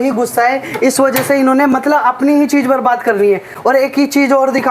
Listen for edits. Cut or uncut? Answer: uncut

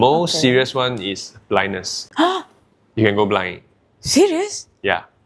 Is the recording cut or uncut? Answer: uncut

